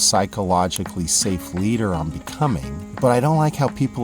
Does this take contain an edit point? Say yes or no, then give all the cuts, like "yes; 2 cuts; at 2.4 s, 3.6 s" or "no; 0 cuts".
yes; 1 cut; at 2.8 s